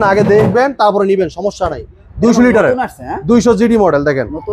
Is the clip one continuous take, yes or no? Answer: no